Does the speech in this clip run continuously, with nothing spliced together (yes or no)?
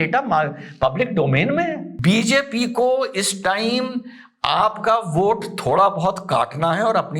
no